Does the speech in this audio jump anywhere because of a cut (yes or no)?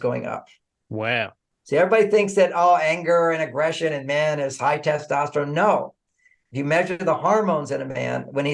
yes